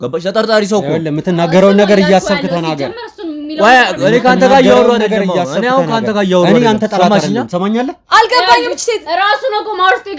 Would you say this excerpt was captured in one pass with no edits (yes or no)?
no